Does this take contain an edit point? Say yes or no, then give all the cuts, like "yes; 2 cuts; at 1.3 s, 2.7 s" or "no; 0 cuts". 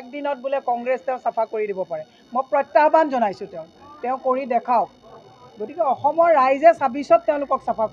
no; 0 cuts